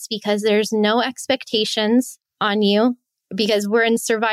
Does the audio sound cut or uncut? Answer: cut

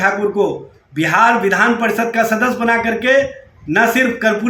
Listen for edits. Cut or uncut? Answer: uncut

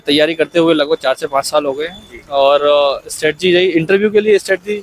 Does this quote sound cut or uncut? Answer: uncut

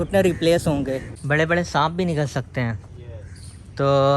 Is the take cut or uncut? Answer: cut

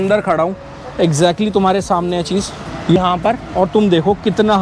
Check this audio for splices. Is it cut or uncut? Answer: cut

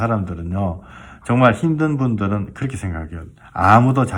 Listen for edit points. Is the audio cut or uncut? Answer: uncut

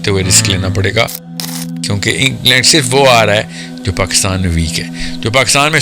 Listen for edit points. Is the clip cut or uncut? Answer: cut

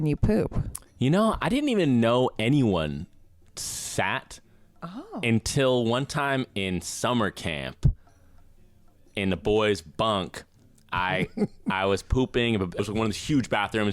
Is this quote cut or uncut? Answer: cut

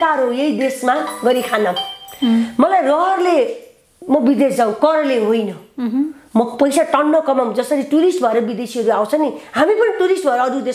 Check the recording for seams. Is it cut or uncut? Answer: uncut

